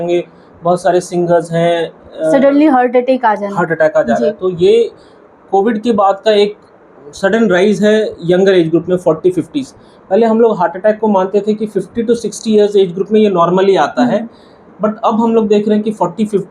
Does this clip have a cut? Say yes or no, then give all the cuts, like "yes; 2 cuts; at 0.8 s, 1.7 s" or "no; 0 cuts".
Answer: no; 0 cuts